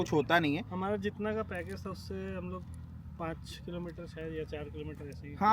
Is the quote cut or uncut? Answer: uncut